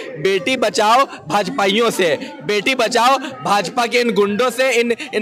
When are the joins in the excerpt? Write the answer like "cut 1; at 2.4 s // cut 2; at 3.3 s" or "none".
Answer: none